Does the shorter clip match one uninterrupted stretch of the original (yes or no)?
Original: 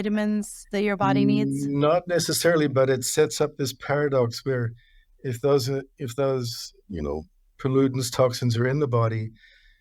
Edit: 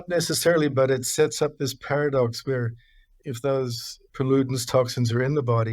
no